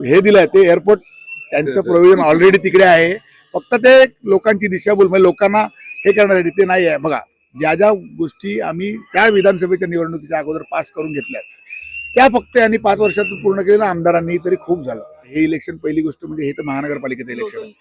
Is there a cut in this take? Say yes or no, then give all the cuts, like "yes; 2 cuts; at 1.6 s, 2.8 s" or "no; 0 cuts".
yes; 1 cut; at 15.2 s